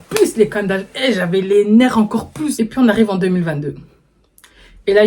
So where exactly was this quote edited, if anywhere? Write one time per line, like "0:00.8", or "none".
0:02.4